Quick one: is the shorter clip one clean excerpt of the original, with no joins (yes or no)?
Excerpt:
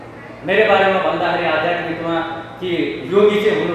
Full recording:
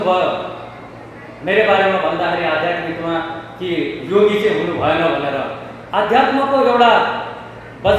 yes